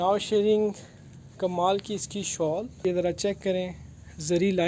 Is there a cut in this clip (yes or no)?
yes